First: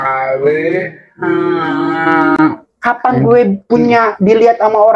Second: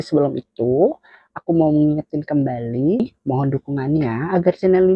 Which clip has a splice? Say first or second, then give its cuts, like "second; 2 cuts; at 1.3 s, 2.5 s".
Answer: second; 1 cut; at 3.0 s